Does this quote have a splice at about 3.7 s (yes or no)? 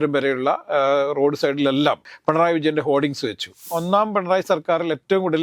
yes